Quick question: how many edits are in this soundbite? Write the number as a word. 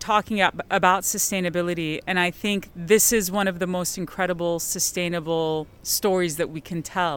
one